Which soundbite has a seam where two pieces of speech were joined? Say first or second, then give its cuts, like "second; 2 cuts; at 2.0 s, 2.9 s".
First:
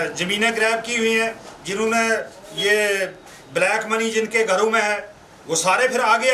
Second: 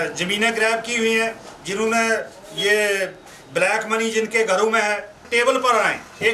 second; 1 cut; at 5.2 s